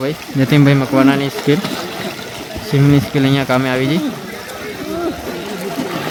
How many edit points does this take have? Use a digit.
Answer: 0